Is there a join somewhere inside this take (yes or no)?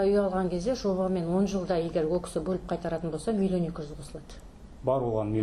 no